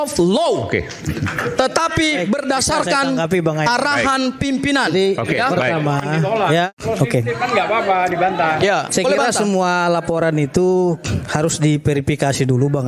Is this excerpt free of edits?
no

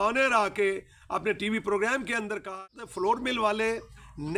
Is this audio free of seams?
no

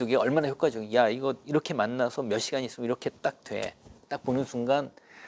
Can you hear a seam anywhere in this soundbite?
no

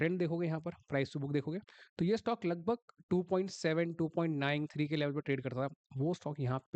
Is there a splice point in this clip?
no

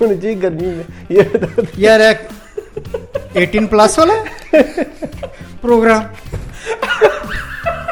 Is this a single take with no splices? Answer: yes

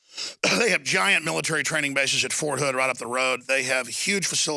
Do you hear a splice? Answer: yes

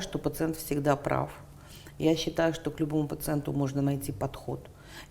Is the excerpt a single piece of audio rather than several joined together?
yes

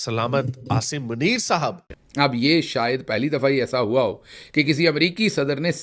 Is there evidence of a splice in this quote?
no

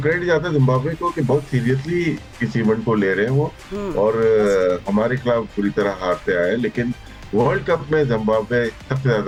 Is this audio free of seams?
yes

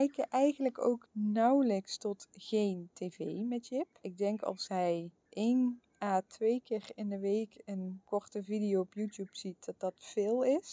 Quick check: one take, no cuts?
no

